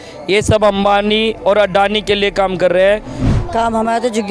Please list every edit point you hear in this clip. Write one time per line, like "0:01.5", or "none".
0:03.2